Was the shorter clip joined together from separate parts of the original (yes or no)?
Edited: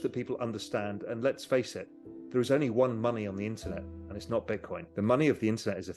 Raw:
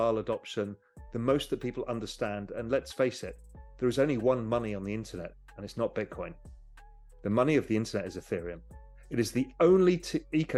yes